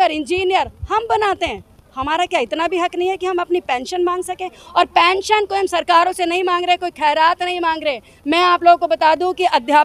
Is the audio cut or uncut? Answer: uncut